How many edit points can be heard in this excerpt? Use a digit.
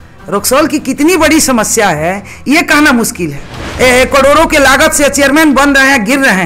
1